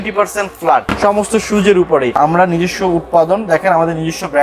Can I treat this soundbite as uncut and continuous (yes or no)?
no